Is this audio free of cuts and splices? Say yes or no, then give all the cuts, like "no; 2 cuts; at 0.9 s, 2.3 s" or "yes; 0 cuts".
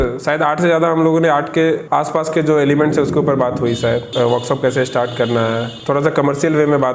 no; 3 cuts; at 1.8 s, 4.1 s, 5.7 s